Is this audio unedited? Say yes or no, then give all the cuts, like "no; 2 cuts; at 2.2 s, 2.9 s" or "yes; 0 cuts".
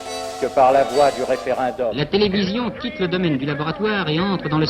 no; 1 cut; at 2.0 s